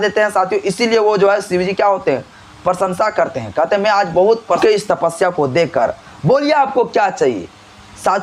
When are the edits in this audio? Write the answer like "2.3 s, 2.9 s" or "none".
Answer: 4.6 s